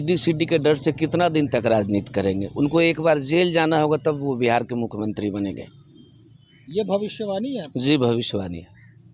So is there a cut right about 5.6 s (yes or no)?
no